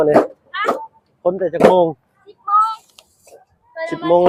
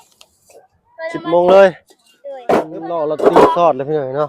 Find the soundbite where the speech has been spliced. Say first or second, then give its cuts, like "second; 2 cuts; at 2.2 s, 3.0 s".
second; 1 cut; at 2.7 s